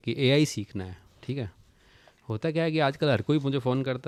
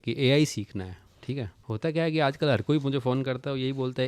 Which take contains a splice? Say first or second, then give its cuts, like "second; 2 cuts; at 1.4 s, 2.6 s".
second; 1 cut; at 1.6 s